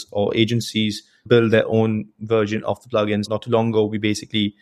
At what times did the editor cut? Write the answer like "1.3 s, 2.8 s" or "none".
1.2 s, 3.3 s